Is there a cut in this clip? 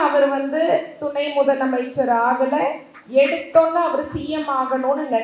no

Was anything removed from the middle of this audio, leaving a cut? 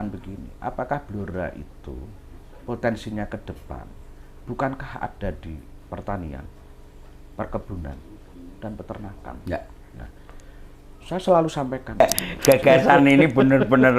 yes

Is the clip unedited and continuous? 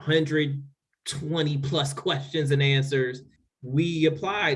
no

